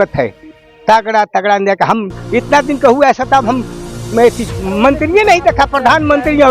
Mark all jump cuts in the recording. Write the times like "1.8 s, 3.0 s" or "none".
5.0 s